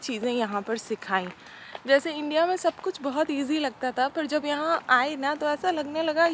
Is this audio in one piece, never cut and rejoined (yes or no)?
yes